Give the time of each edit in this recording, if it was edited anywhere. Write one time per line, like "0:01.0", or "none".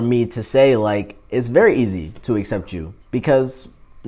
none